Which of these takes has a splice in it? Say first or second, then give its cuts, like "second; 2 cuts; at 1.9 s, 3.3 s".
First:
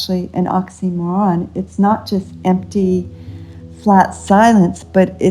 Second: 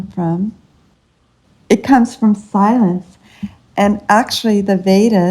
second; 1 cut; at 1.2 s